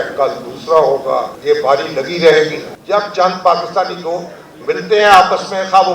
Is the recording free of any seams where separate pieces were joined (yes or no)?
no